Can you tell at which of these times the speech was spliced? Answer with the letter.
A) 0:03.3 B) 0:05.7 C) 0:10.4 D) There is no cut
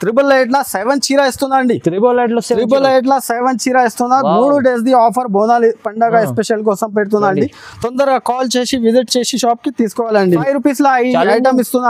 C